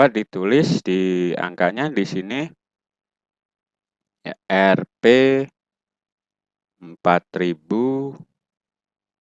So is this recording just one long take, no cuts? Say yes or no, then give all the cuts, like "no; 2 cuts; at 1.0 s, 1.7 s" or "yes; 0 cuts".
yes; 0 cuts